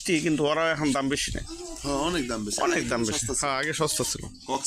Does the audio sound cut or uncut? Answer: uncut